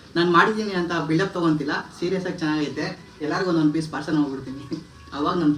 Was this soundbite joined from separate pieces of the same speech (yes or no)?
no